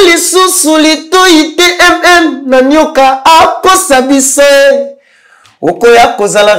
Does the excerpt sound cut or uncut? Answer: uncut